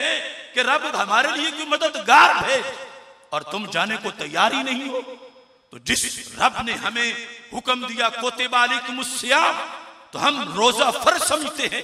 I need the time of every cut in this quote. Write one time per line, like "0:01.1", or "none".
none